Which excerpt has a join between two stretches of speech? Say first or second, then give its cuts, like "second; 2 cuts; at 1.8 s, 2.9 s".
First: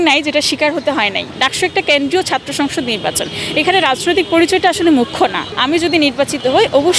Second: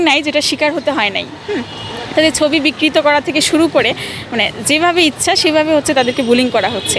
first; 2 cuts; at 1.3 s, 5.5 s